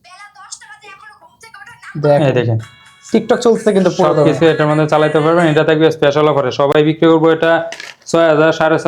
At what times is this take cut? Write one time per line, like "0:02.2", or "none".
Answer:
none